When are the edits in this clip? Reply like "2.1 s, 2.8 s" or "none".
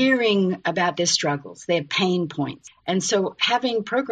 2.6 s